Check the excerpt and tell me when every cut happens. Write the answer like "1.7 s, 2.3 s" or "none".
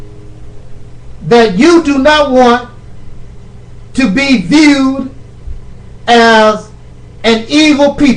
6.7 s